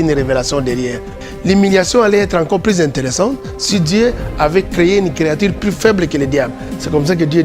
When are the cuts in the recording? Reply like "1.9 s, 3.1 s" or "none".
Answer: 1.2 s